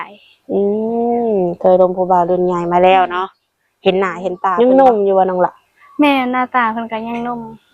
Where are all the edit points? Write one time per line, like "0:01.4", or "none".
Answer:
0:04.4